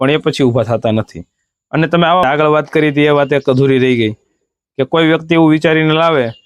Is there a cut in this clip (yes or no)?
yes